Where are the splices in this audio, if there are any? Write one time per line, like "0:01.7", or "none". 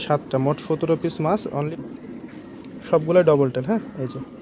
0:01.7